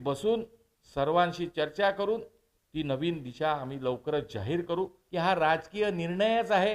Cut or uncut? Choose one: cut